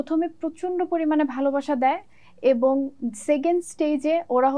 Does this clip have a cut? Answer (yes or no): no